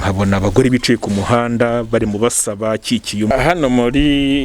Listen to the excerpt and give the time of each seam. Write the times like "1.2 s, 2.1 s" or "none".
3.3 s